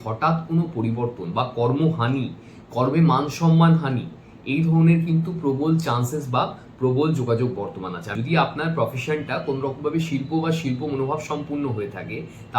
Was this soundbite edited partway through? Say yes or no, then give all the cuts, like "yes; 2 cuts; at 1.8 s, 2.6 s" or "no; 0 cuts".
yes; 1 cut; at 8.1 s